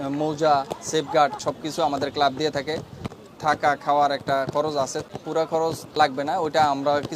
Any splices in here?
yes; 4 cuts; at 1.4 s, 3.1 s, 5.0 s, 5.8 s

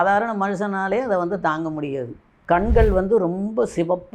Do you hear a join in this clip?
yes; 1 cut; at 2.3 s

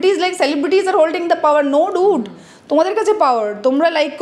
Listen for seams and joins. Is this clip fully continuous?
yes; 0 cuts

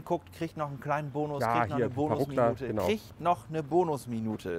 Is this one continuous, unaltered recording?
yes; 0 cuts

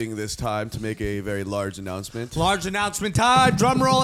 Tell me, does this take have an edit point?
no; 0 cuts

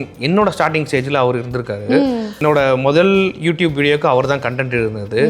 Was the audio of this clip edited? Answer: yes; 1 cut; at 2.4 s

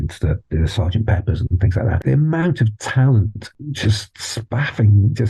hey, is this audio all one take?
no; 2 cuts; at 2.0 s, 3.5 s

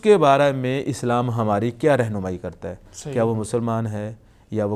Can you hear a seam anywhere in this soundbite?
no; 0 cuts

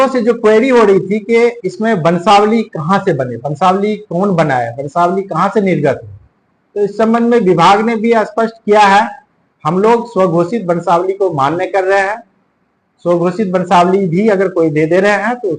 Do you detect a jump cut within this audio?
no; 0 cuts

